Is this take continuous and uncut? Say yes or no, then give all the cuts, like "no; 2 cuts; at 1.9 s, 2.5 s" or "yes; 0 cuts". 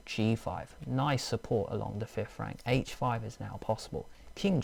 yes; 0 cuts